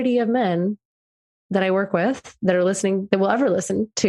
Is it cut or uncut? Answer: uncut